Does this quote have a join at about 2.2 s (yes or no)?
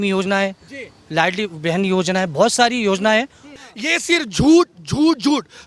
no